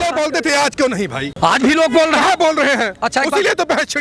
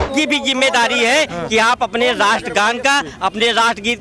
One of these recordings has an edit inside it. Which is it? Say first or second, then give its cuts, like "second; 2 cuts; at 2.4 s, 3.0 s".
first; 1 cut; at 1.2 s